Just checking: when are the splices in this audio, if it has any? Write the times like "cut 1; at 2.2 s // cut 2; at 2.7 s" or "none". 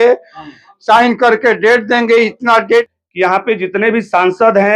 cut 1; at 2.9 s